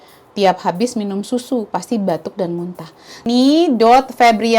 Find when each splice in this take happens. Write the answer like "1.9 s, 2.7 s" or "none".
3.3 s